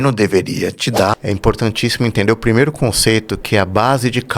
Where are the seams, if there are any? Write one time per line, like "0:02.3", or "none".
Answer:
0:01.2